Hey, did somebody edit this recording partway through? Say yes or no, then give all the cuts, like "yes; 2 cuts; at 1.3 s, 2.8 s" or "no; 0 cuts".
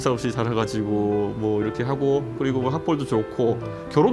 no; 0 cuts